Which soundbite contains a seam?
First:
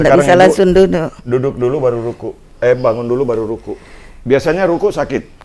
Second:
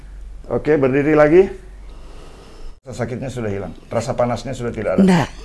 second; 1 cut; at 2.9 s

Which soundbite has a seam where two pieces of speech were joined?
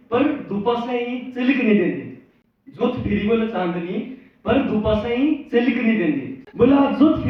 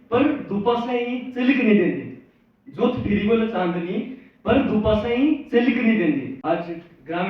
second; 1 cut; at 6.3 s

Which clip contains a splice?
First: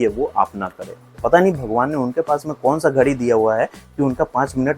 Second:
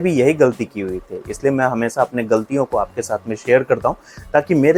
first; 1 cut; at 1.2 s

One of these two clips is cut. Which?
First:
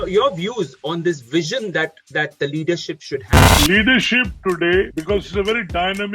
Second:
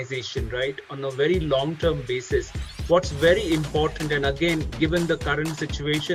first; 2 cuts; at 3.5 s, 4.9 s

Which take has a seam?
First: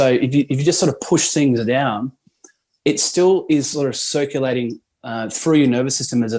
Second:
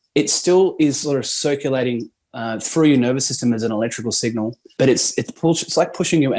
second; 1 cut; at 4.6 s

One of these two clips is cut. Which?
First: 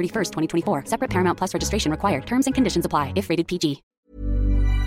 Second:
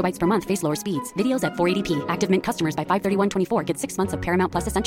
first; 1 cut; at 4.0 s

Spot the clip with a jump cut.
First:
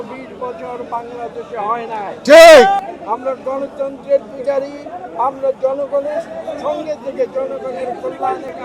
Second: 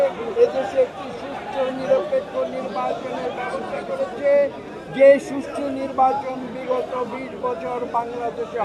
first; 1 cut; at 2.8 s

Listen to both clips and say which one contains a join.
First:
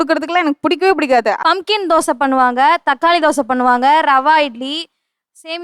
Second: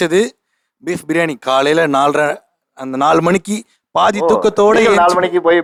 first; 1 cut; at 1.4 s

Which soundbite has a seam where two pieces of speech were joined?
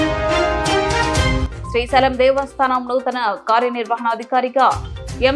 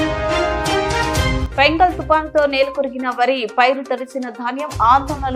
first; 1 cut; at 1.4 s

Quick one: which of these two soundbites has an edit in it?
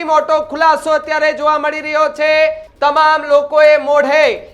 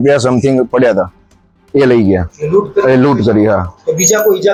first; 1 cut; at 2.7 s

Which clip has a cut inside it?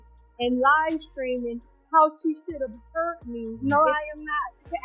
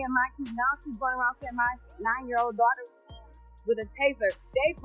first; 1 cut; at 3.5 s

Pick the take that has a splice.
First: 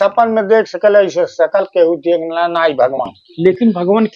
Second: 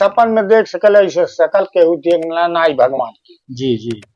first; 1 cut; at 3.2 s

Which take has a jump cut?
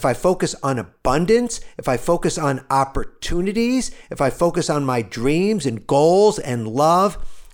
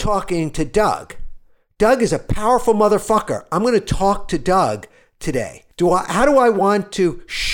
second; 1 cut; at 5.6 s

